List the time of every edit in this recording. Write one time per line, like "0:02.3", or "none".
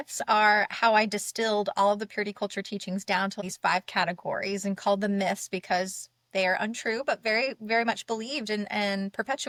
none